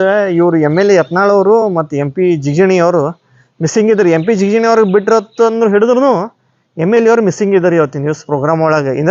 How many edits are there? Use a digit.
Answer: 0